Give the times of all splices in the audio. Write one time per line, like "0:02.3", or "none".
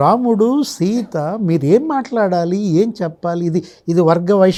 none